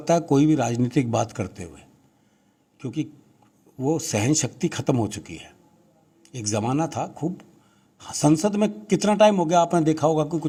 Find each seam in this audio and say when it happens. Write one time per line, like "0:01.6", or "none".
none